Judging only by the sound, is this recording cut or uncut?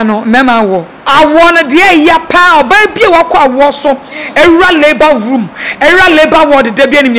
cut